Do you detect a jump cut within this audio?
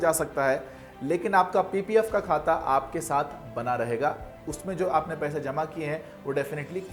no; 0 cuts

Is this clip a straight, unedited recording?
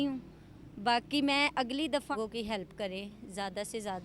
no; 1 cut; at 2.1 s

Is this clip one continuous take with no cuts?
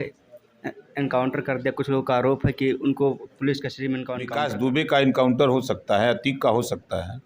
no; 1 cut; at 4.3 s

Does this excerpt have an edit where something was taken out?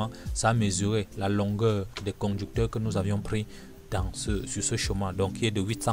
yes; 1 cut; at 1.9 s

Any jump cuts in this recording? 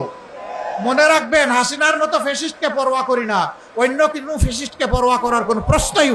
no; 0 cuts

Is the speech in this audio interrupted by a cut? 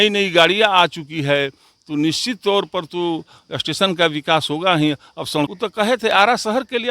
yes; 1 cut; at 5.5 s

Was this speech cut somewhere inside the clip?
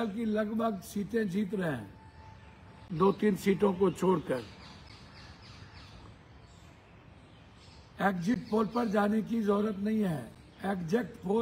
no; 0 cuts

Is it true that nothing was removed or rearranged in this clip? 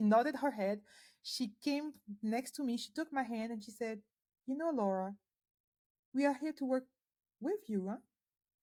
yes; 0 cuts

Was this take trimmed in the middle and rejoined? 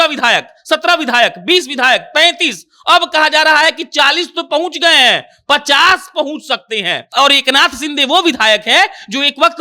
yes; 1 cut; at 7.0 s

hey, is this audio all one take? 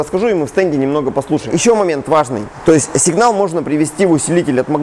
no; 2 cuts; at 1.5 s, 2.5 s

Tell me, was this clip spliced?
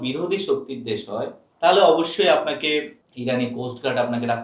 yes; 2 cuts; at 1.4 s, 3.0 s

